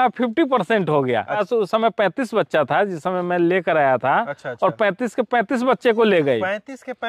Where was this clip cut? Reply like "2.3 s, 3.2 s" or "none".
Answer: 1.4 s

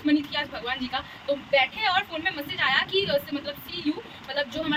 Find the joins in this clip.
none

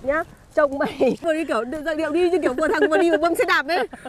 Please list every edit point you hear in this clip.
1.2 s

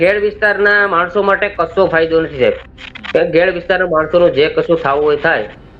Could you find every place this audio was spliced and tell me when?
2.6 s

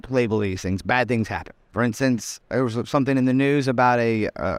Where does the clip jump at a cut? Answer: 1.6 s, 2.4 s

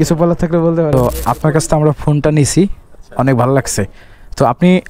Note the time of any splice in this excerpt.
1.0 s

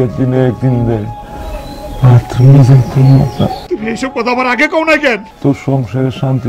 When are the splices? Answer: 3.6 s, 5.3 s

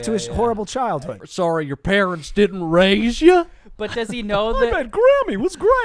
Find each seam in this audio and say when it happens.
1.2 s

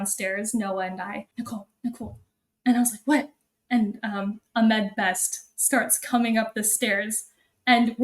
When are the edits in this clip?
1.3 s

